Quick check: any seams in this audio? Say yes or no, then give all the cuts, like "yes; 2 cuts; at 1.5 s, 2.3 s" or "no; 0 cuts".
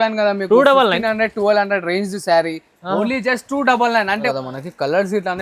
yes; 1 cut; at 4.3 s